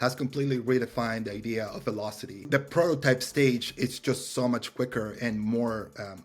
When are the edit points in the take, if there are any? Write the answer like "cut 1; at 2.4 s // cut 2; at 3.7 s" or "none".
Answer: cut 1; at 2.5 s